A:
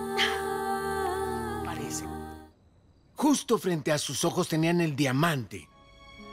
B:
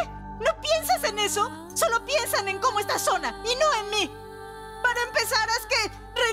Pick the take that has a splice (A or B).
A